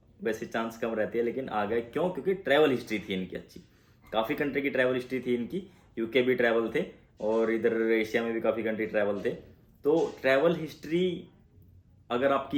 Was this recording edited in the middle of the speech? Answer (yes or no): no